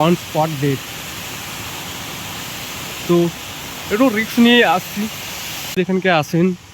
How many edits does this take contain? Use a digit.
1